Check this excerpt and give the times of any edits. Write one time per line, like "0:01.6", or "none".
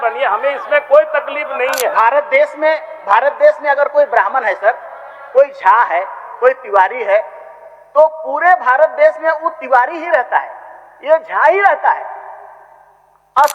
0:01.9